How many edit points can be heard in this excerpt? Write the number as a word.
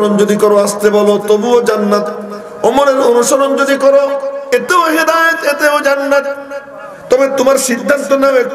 zero